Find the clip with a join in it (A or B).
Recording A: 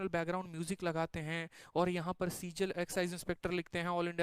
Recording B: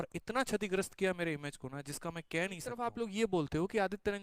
B